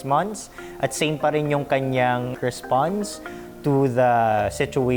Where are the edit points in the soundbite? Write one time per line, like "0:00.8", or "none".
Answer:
0:02.3